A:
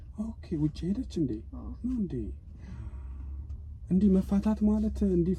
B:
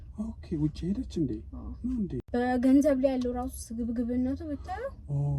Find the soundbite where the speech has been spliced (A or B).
B